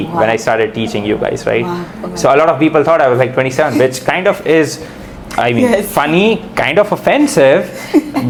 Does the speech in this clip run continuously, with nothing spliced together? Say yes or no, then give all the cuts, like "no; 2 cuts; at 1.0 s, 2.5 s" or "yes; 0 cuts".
yes; 0 cuts